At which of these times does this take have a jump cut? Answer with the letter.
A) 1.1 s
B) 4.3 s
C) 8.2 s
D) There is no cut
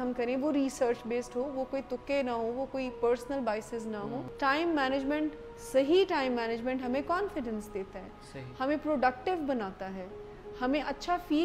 B